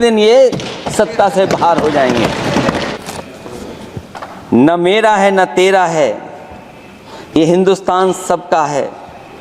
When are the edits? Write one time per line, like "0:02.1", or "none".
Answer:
0:02.9